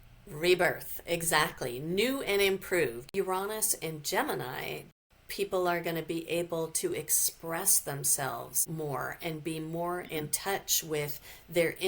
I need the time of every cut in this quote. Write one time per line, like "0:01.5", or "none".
0:03.2
0:05.0